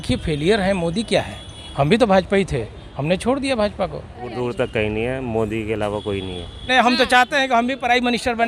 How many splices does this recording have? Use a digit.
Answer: 2